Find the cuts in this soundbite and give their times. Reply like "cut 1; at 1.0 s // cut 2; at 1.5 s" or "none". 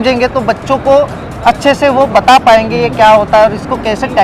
none